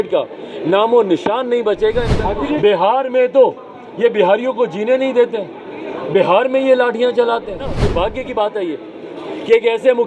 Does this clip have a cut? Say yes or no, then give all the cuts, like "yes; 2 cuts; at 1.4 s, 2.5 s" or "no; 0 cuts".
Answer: yes; 2 cuts; at 2.2 s, 7.8 s